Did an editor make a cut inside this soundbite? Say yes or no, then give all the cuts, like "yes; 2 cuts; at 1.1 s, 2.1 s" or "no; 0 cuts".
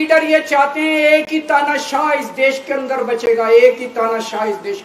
no; 0 cuts